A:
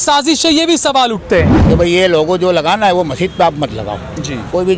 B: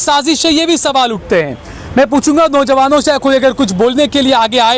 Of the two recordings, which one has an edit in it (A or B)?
A